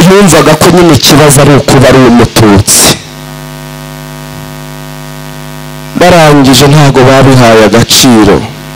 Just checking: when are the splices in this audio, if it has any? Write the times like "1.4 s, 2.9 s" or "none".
none